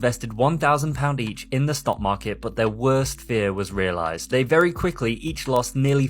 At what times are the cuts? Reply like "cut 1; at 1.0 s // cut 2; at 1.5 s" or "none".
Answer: none